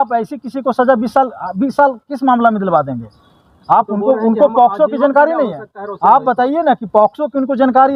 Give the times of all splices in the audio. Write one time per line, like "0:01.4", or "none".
none